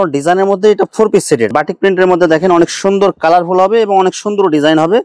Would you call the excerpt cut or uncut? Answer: cut